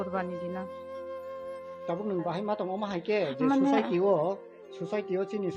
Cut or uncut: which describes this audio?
uncut